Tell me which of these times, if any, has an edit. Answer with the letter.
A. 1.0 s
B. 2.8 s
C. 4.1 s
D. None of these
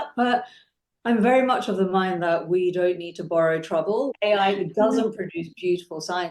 C